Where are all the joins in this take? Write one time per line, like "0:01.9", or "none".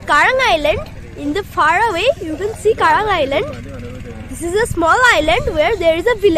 none